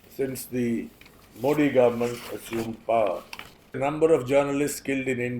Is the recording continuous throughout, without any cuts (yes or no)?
no